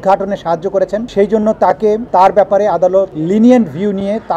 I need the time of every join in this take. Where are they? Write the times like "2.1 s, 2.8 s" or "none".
1.1 s, 2.0 s, 3.2 s